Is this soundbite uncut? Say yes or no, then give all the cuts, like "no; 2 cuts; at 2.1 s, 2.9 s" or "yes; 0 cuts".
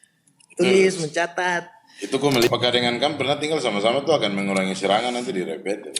no; 1 cut; at 2.5 s